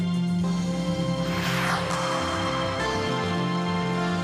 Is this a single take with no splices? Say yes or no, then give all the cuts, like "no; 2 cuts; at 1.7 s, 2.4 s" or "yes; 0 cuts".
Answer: yes; 0 cuts